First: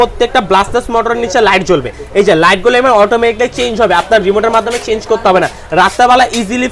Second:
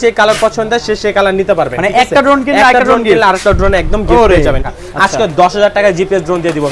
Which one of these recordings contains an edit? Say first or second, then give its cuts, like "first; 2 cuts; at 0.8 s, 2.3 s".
second; 1 cut; at 4.7 s